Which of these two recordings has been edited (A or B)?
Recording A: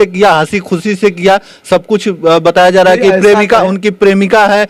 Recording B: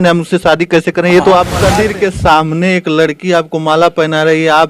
B